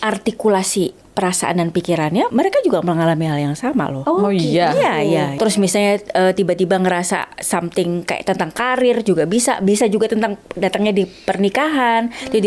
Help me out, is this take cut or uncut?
cut